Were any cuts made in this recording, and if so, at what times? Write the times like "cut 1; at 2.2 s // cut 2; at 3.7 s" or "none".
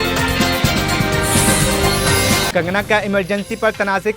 cut 1; at 2.5 s